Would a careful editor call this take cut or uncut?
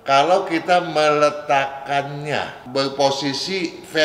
cut